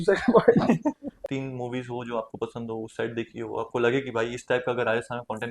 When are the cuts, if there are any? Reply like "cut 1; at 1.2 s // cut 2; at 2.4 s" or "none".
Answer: cut 1; at 1.1 s